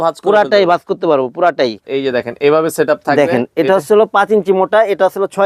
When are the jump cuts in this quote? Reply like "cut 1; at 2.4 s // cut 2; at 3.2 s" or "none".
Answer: cut 1; at 1.8 s